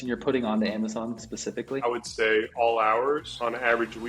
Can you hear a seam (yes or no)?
yes